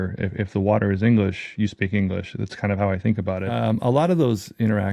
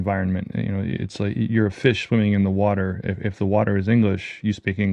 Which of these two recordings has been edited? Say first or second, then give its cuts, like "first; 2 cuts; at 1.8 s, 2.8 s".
first; 1 cut; at 3.5 s